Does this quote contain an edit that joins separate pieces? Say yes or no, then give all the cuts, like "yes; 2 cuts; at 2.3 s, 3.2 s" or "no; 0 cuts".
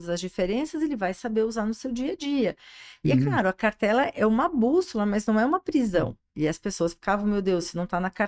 no; 0 cuts